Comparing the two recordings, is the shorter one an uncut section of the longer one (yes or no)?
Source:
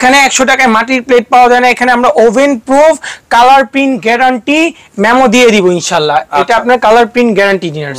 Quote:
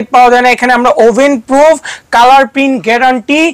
yes